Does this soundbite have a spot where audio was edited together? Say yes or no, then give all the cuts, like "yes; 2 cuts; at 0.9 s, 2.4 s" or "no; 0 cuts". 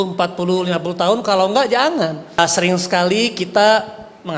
yes; 1 cut; at 2.4 s